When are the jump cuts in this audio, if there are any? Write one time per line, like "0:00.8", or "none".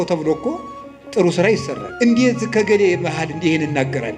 0:01.8